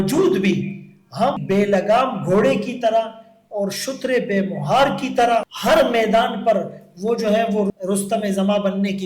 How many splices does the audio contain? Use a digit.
3